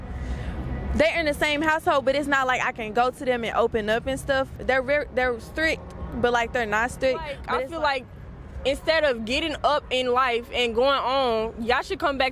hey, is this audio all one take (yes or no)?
no